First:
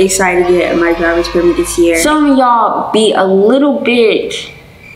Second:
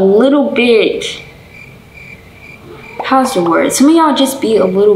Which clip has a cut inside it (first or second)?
first